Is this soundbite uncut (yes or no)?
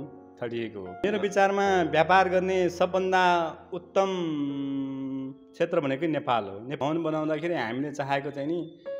no